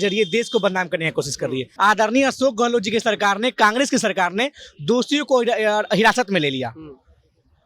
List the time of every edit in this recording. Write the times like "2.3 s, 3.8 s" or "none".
1.7 s